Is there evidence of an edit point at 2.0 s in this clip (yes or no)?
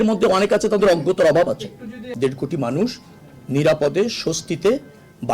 yes